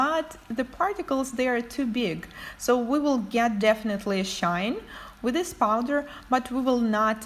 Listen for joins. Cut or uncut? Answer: cut